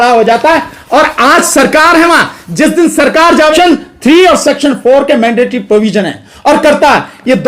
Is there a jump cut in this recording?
yes; 1 cut; at 3.5 s

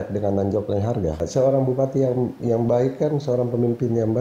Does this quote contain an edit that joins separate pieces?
yes; 2 cuts; at 1.2 s, 2.4 s

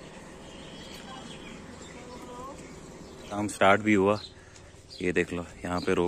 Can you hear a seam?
no; 0 cuts

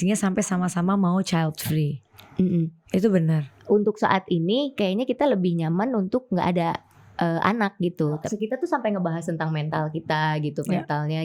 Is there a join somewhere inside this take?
yes; 2 cuts; at 3.5 s, 8.2 s

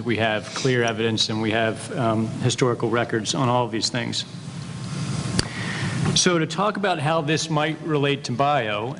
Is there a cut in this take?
no; 0 cuts

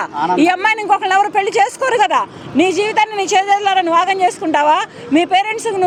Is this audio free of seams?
yes; 0 cuts

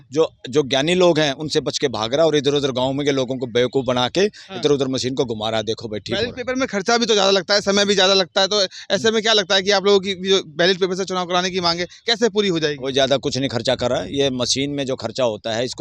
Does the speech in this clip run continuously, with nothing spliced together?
yes; 0 cuts

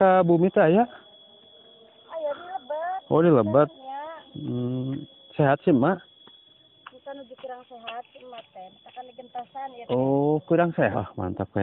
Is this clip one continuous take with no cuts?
no; 1 cut; at 10.7 s

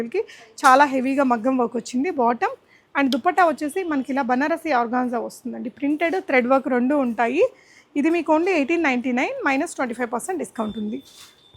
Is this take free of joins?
yes; 0 cuts

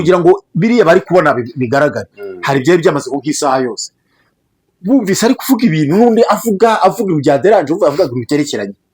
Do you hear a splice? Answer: no; 0 cuts

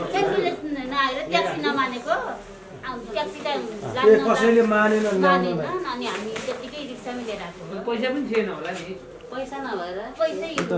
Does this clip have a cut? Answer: no; 0 cuts

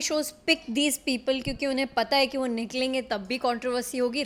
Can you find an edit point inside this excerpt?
no; 0 cuts

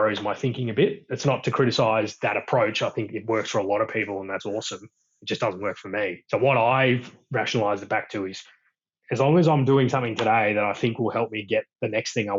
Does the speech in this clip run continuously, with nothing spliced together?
yes; 0 cuts

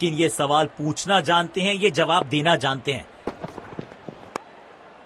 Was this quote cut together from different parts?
yes; 2 cuts; at 3.1 s, 4.2 s

